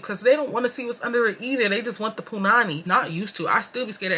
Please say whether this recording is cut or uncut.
cut